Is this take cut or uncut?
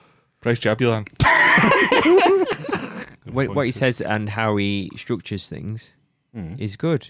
cut